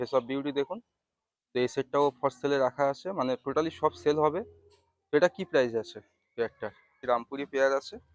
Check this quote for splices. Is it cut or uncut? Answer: cut